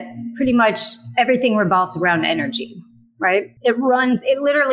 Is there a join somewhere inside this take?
yes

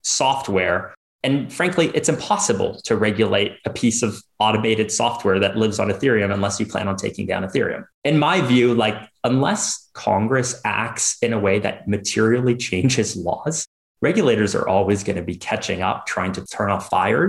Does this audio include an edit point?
no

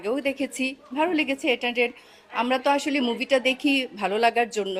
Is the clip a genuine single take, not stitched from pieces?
yes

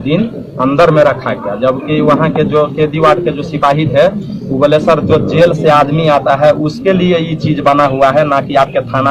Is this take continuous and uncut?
yes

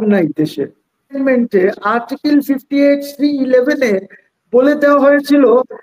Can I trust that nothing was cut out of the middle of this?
no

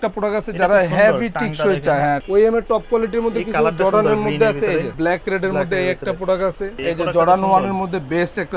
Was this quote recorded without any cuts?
no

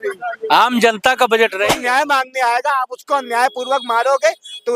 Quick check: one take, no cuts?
no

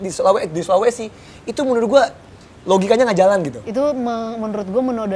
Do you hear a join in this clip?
no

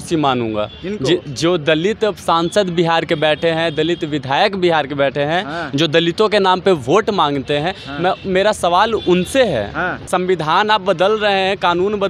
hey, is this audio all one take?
no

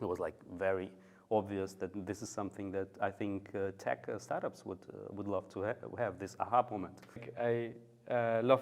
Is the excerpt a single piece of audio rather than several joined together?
no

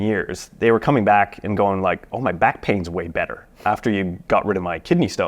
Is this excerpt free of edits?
no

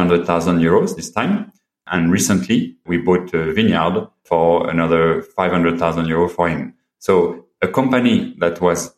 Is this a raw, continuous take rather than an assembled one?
yes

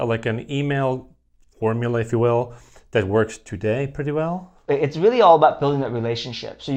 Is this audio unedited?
yes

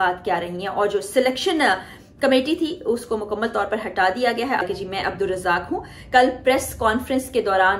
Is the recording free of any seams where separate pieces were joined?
no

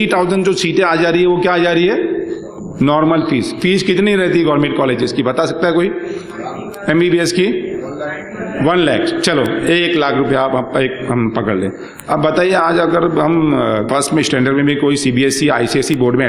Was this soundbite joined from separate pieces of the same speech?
yes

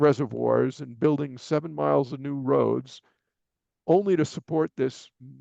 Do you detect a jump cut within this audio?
no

